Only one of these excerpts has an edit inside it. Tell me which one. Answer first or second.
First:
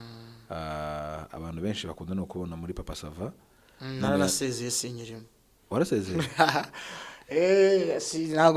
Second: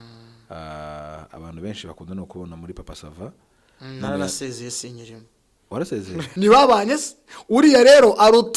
second